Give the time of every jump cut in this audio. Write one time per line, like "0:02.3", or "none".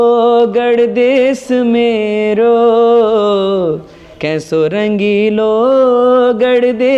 none